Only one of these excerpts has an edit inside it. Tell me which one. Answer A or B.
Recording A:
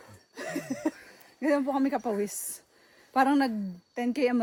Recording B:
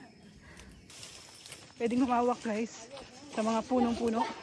B